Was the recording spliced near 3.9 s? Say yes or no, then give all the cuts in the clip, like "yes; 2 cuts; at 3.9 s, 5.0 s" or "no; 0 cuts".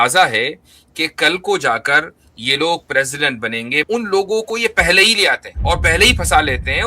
yes; 2 cuts; at 3.9 s, 5.5 s